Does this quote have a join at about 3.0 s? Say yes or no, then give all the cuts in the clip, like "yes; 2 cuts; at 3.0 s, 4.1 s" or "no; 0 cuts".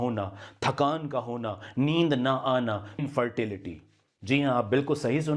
yes; 1 cut; at 3.0 s